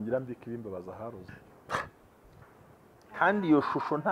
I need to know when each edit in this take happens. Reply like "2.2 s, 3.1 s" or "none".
1.4 s